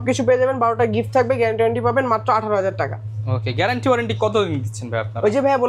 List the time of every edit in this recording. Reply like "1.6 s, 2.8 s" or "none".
none

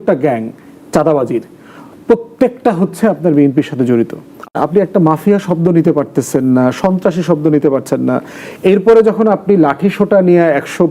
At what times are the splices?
4.5 s

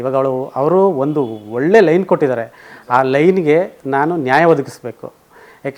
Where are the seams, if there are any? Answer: none

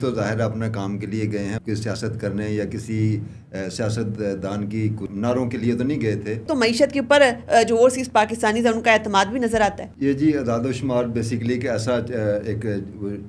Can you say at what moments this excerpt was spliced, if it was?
1.6 s, 5.1 s, 6.5 s, 9.9 s

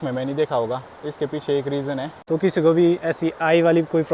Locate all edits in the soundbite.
2.1 s

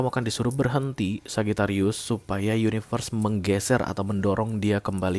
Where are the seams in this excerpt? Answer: none

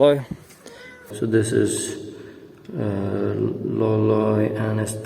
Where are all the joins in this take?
1.0 s

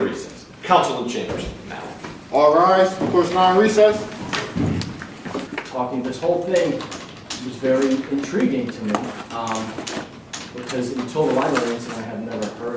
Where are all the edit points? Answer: 5.4 s

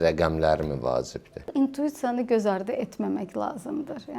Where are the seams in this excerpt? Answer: 1.5 s

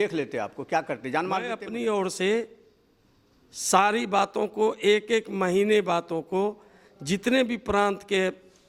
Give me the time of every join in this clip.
1.6 s

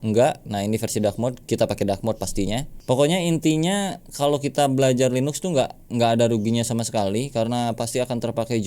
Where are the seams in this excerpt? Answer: 2.8 s

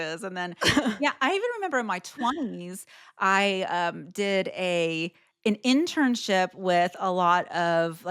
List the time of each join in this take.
none

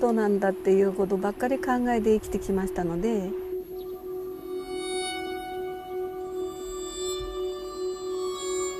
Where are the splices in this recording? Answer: 1.3 s

